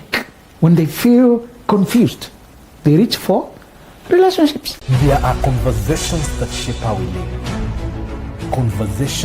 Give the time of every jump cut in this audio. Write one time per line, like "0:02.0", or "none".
0:04.7

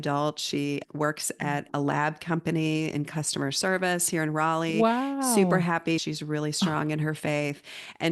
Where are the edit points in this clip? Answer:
0:06.0

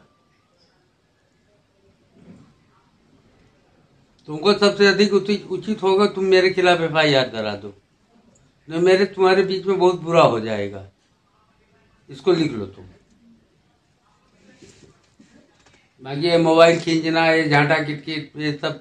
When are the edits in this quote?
none

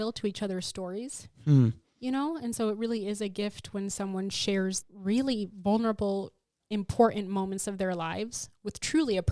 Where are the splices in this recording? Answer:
0:04.9
0:06.6

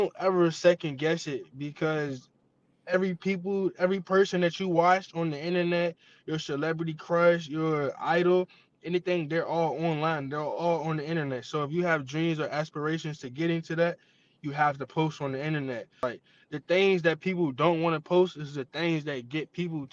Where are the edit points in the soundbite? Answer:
0:16.0

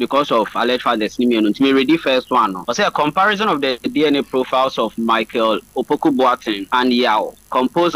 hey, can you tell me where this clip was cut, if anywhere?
0:02.6
0:03.8
0:06.6

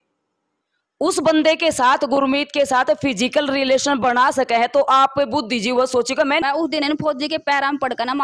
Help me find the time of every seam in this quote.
0:06.4

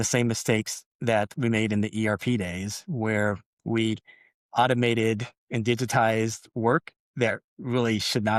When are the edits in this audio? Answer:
none

